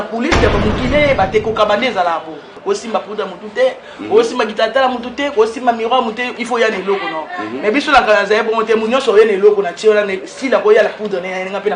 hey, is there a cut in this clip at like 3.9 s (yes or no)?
no